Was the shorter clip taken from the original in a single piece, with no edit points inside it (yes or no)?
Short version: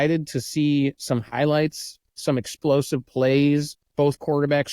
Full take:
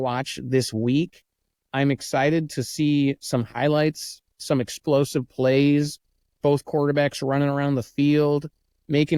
no